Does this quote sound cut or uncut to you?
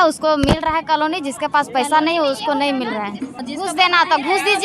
cut